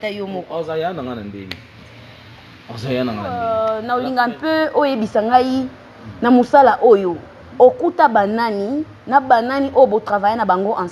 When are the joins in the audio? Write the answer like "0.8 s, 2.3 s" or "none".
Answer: 3.4 s